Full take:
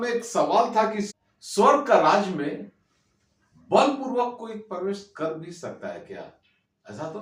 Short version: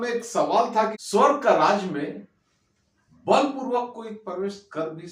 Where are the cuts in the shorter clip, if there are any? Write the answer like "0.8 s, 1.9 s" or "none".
1.0 s